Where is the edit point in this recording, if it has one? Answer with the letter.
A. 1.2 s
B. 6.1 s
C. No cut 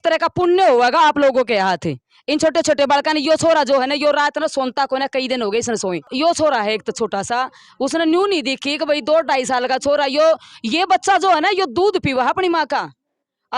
B